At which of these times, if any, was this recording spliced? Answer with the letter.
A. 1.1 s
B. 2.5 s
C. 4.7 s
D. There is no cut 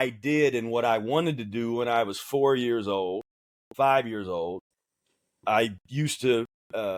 D